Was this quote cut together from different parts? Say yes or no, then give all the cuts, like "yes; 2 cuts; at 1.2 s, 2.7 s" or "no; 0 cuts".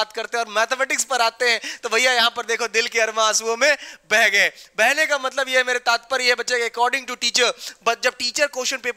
no; 0 cuts